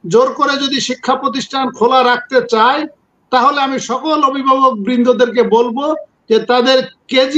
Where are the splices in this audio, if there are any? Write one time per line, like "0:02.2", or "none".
none